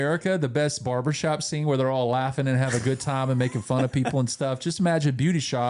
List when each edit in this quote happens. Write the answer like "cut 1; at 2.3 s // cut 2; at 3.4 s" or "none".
none

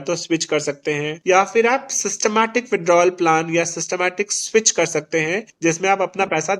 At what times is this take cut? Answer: cut 1; at 1.1 s // cut 2; at 5.5 s

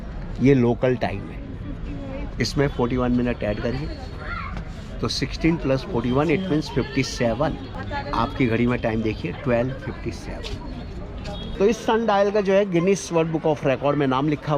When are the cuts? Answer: cut 1; at 11.6 s

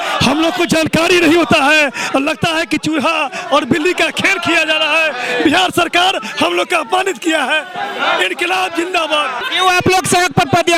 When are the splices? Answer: none

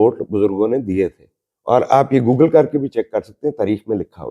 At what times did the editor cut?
none

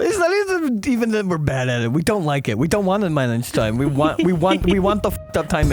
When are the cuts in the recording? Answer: none

